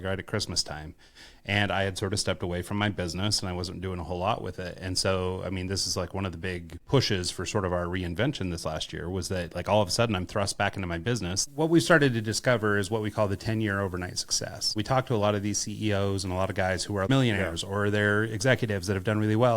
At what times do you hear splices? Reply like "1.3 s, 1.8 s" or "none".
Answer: 11.5 s, 14.8 s, 17.1 s